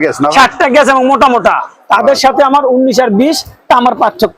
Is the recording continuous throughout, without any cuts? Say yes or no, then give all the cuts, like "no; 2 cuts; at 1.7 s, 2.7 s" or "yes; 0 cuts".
yes; 0 cuts